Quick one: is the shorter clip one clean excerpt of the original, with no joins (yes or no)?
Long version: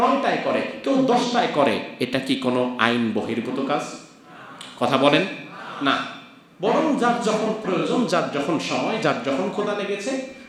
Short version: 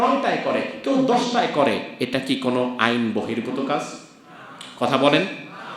yes